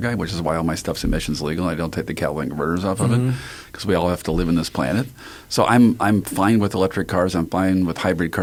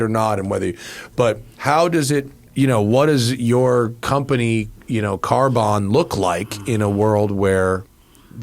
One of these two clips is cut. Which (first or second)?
second